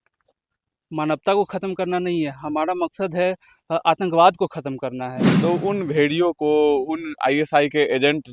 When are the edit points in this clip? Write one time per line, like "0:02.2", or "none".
0:05.2